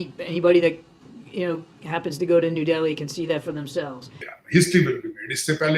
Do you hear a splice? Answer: yes; 1 cut; at 4.4 s

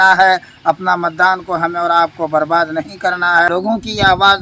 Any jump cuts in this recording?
yes; 1 cut; at 3.5 s

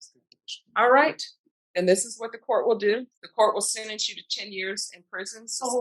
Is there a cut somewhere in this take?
yes; 1 cut; at 3.2 s

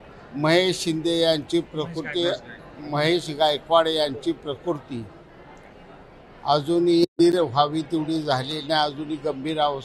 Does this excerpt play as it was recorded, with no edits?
no; 1 cut; at 7.1 s

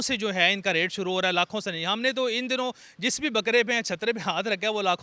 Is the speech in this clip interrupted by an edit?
no; 0 cuts

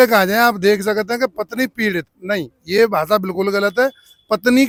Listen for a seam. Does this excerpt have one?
no; 0 cuts

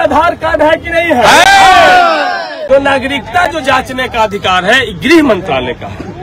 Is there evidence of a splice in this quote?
yes; 1 cut; at 2.6 s

